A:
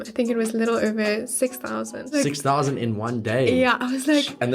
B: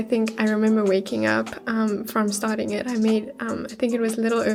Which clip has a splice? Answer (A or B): A